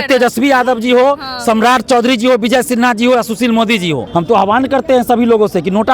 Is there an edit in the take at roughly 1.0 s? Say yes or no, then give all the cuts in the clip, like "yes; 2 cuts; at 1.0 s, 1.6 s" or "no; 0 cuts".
no; 1 cut; at 4.0 s